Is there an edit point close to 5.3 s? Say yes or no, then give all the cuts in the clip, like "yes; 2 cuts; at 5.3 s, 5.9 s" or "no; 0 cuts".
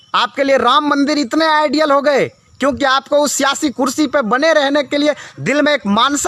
no; 0 cuts